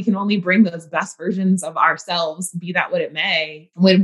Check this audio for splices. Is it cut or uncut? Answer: uncut